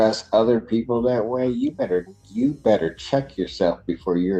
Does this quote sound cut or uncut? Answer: uncut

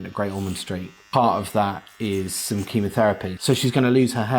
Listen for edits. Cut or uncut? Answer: cut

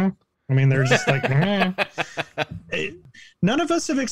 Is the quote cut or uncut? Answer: cut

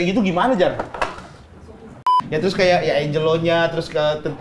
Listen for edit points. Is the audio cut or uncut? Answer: cut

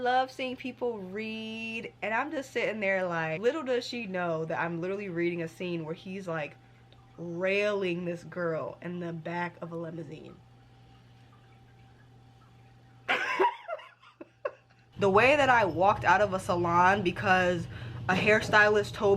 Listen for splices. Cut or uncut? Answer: cut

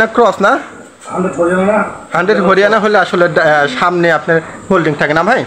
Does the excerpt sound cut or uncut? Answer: uncut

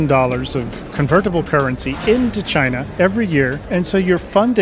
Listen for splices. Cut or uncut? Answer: cut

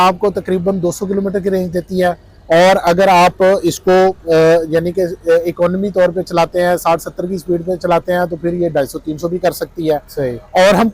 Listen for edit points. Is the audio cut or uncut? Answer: uncut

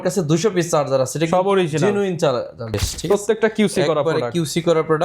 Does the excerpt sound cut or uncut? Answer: cut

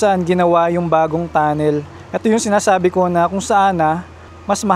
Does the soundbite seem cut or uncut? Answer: uncut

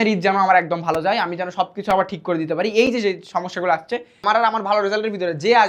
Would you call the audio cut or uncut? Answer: cut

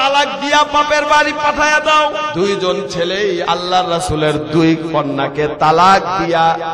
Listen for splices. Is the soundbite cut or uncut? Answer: cut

